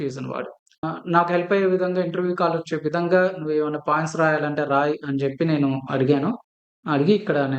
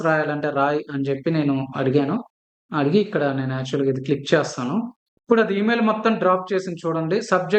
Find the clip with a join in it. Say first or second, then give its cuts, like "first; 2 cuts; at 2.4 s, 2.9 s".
first; 1 cut; at 0.9 s